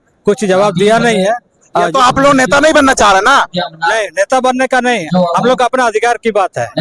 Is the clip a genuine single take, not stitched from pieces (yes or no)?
yes